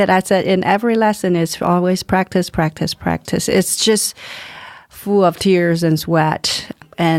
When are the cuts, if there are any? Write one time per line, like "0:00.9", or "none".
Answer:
none